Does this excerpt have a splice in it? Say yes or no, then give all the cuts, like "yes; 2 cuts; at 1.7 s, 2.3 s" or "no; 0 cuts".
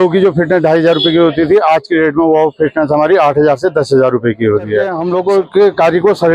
yes; 1 cut; at 5.0 s